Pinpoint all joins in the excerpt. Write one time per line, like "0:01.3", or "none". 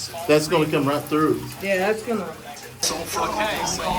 0:02.9